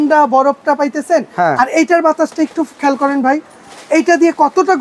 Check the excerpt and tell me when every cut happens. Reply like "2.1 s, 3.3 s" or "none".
none